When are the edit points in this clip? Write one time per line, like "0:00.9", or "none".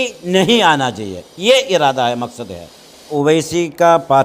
0:03.1

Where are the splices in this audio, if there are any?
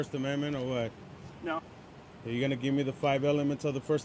none

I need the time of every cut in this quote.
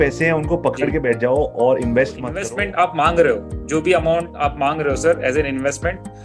0:02.4

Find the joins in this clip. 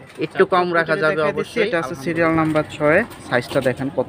0:01.4

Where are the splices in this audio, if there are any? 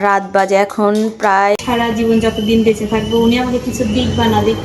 0:01.6

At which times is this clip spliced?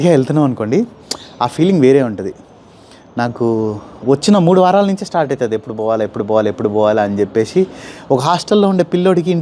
none

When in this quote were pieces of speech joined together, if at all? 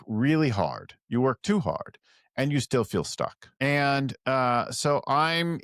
none

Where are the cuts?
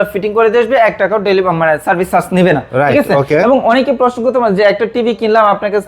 none

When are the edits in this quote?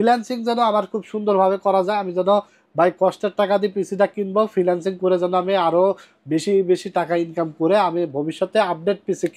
none

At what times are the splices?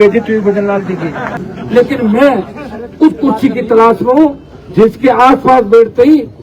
0:01.3

